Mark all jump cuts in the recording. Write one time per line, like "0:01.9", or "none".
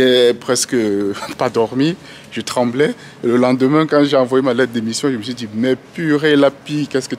none